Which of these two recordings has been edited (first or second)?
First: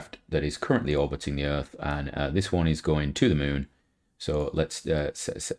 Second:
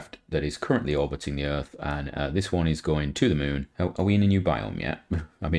second